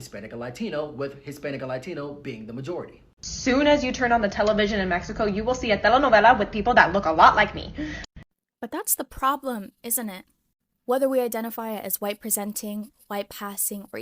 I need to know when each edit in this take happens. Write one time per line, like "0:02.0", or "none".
0:03.0